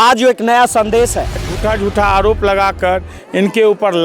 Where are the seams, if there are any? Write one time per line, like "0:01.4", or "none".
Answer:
0:01.4